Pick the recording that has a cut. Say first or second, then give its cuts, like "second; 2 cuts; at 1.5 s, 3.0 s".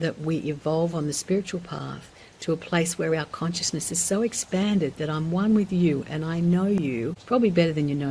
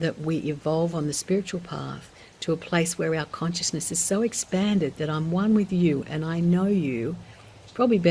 first; 1 cut; at 7.2 s